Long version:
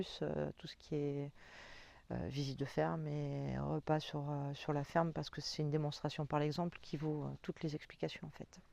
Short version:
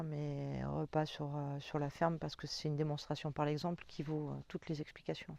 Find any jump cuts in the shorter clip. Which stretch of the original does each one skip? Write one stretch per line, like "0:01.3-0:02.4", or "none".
none